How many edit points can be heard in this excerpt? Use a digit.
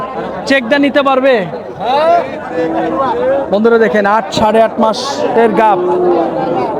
0